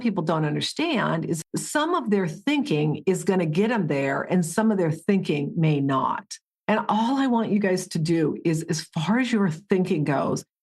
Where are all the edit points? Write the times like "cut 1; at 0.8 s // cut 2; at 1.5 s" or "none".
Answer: cut 1; at 1.4 s

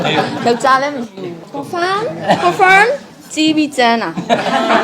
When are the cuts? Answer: cut 1; at 1.5 s // cut 2; at 3.1 s

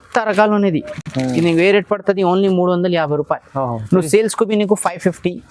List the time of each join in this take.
none

